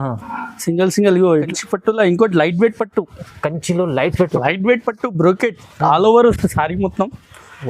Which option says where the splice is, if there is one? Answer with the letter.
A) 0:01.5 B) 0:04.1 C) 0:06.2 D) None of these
A